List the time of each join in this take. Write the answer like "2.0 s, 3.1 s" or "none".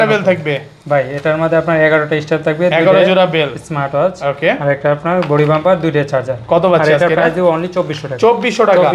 none